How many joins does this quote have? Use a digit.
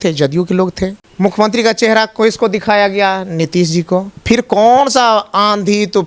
2